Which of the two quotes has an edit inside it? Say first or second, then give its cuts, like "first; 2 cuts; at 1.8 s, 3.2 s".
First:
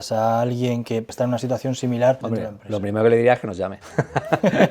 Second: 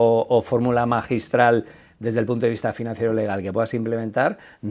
first; 3 cuts; at 1.1 s, 2.2 s, 3.8 s